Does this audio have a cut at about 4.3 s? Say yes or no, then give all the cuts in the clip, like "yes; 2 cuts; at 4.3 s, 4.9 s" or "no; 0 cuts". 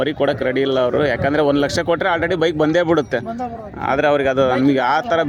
no; 0 cuts